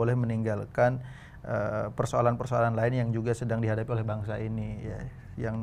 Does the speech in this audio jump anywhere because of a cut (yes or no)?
no